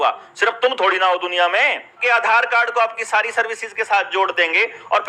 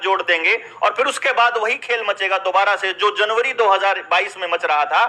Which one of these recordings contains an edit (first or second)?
first